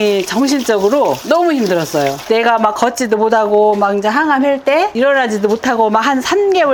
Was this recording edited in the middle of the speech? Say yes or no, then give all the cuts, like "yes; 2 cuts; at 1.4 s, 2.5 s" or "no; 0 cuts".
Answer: no; 0 cuts